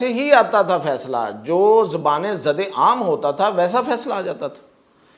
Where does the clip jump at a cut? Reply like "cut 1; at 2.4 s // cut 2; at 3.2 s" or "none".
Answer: none